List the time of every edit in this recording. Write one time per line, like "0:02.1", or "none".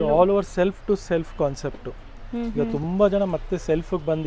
none